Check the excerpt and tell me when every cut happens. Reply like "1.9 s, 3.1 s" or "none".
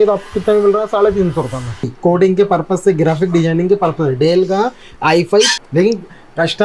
1.9 s, 5.6 s